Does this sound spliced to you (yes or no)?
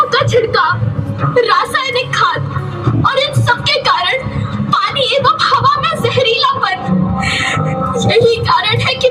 no